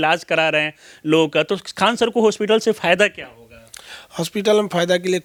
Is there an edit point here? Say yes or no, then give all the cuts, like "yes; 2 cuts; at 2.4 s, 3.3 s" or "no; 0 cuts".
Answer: no; 0 cuts